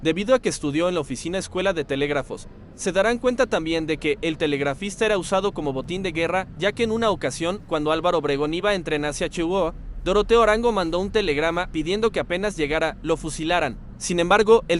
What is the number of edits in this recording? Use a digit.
1